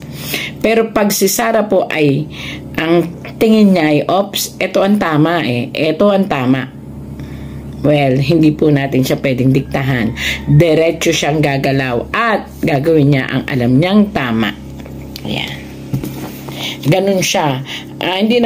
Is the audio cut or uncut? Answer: uncut